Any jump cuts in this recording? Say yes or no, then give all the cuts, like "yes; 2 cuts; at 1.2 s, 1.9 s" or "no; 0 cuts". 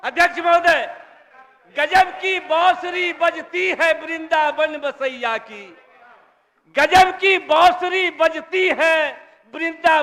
no; 0 cuts